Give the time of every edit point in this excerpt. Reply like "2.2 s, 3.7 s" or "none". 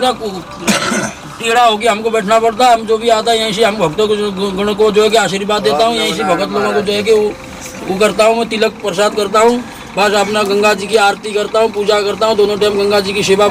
none